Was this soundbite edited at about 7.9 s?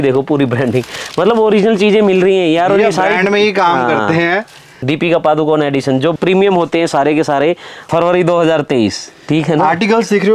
yes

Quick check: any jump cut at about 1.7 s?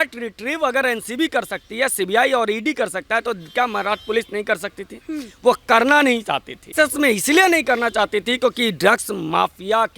no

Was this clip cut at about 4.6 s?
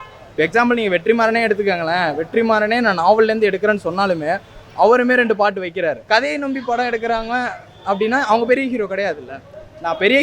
no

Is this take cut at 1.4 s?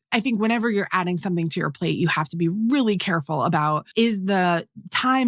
no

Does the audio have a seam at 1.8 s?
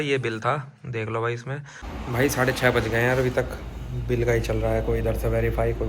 yes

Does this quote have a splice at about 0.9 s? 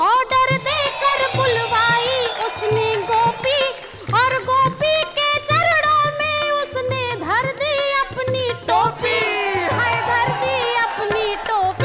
yes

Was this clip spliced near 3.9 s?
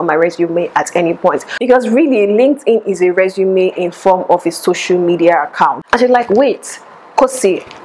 no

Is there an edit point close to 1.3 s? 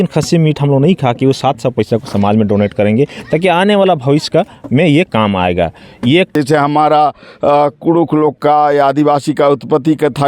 no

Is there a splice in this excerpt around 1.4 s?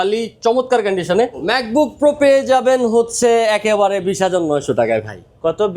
yes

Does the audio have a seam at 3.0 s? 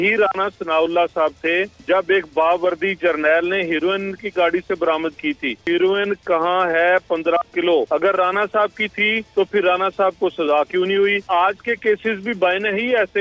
no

